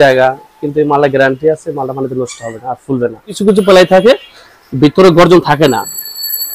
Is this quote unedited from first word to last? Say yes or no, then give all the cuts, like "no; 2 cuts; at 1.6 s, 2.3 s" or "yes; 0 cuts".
no; 1 cut; at 3.4 s